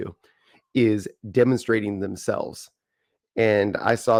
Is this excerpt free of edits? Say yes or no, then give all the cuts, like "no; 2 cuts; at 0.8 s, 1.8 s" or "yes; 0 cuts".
yes; 0 cuts